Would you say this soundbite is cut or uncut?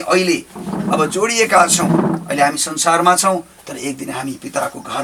uncut